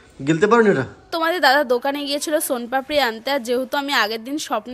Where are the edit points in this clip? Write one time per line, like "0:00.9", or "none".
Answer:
0:01.1